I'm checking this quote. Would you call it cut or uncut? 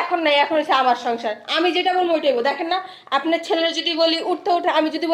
uncut